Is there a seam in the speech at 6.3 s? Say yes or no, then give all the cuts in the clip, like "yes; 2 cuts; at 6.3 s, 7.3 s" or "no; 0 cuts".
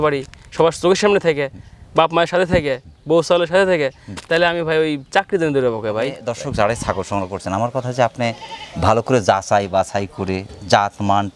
yes; 1 cut; at 6.3 s